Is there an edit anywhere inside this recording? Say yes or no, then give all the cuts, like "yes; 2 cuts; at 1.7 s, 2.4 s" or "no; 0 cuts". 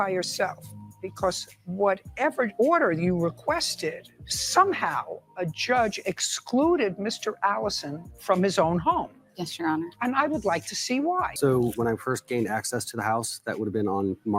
yes; 1 cut; at 11.3 s